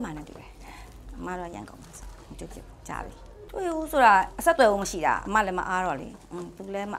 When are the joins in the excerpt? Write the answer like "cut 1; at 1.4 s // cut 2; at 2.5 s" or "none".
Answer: cut 1; at 3.4 s